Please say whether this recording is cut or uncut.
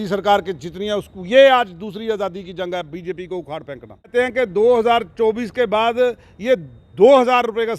cut